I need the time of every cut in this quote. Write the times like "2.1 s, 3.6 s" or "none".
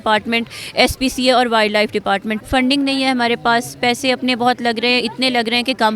2.4 s

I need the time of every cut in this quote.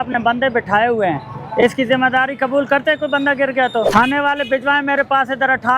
3.9 s

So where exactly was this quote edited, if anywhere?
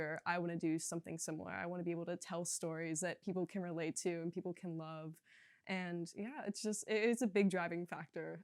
none

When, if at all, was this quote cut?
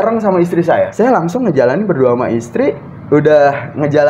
0.9 s

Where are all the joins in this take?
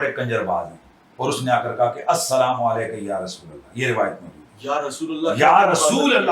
1.0 s

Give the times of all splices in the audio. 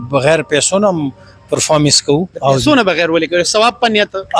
2.3 s

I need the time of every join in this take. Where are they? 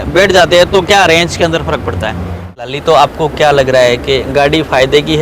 2.7 s

